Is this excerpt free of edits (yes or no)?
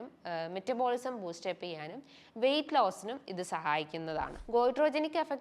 no